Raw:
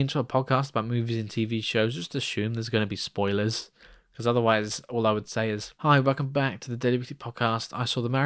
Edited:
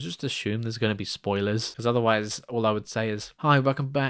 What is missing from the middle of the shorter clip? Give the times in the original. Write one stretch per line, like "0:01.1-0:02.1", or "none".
0:03.6-0:04.1